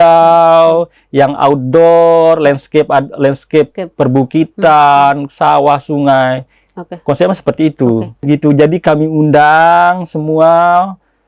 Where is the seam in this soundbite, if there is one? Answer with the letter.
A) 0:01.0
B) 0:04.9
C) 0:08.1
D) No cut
C